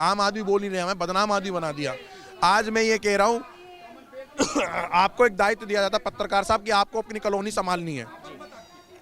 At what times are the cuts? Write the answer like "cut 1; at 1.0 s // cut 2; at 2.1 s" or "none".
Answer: none